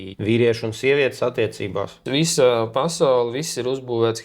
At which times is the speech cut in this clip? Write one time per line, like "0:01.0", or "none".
none